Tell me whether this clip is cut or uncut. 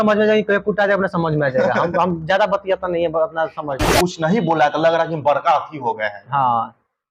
cut